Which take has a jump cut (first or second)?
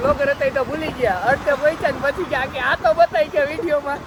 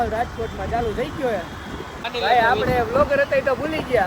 second